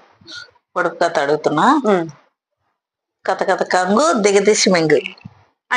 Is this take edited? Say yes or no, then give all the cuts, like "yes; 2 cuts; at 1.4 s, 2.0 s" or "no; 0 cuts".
no; 0 cuts